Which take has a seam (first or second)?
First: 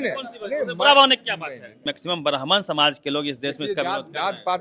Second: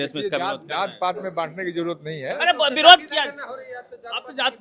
first